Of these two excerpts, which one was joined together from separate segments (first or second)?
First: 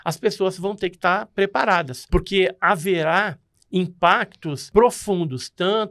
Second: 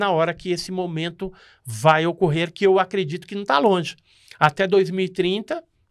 first